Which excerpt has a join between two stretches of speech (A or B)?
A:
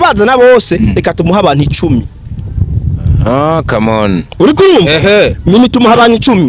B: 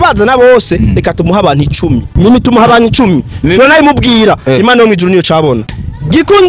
B